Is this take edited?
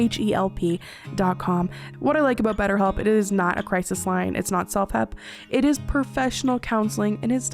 yes; 1 cut; at 1.8 s

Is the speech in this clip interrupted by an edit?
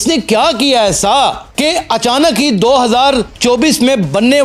no; 0 cuts

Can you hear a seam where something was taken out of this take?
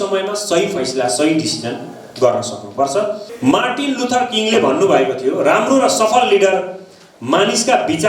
yes; 1 cut; at 3.3 s

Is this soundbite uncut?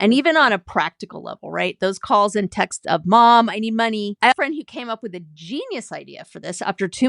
no; 1 cut; at 4.3 s

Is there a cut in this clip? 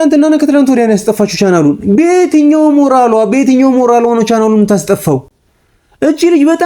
no; 0 cuts

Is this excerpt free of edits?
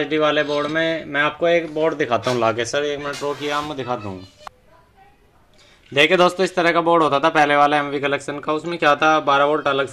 yes; 0 cuts

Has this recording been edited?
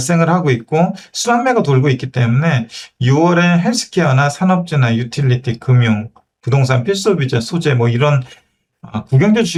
no; 0 cuts

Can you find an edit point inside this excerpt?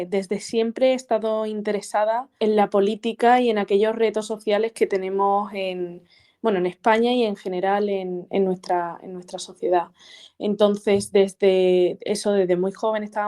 yes; 1 cut; at 2.3 s

